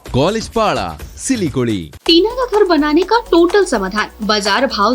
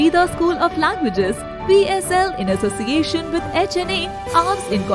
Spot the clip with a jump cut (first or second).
first